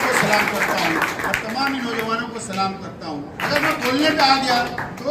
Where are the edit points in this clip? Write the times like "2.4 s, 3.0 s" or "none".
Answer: 3.4 s